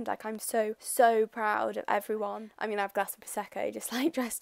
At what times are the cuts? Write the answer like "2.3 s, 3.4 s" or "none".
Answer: 2.6 s